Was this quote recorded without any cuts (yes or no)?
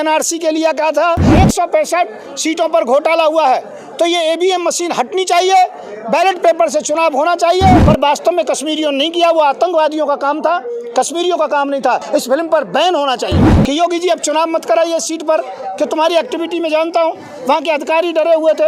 no